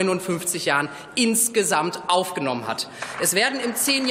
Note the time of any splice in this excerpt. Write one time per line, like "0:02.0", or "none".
none

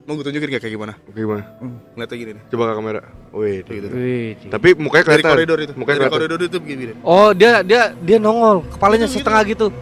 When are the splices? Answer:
none

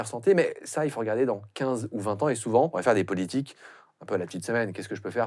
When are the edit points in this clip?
0:02.8

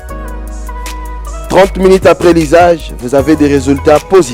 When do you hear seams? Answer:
0:01.3

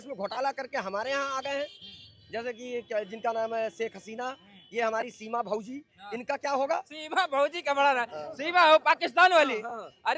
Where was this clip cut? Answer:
none

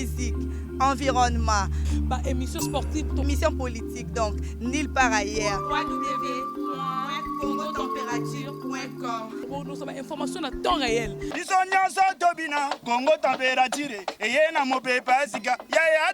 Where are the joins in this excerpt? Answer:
none

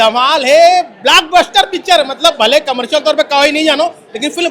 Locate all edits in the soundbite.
none

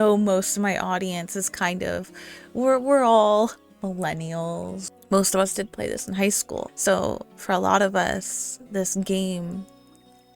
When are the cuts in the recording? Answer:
0:04.8
0:06.7

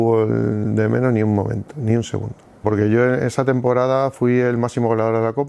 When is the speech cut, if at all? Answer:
0:02.6

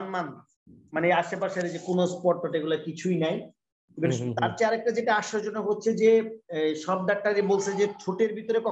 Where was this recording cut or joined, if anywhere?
none

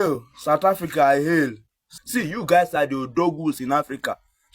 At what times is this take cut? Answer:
0:01.9

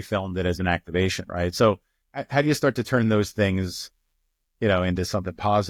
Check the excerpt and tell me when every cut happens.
none

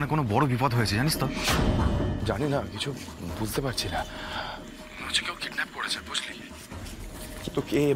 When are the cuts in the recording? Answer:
0:01.2
0:02.3

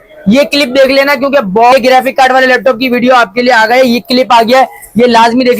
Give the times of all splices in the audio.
0:01.7

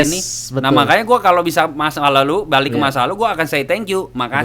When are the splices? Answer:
none

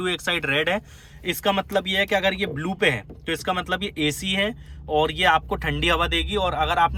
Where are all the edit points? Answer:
none

